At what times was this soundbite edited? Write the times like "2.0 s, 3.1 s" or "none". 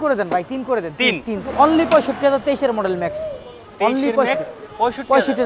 1.5 s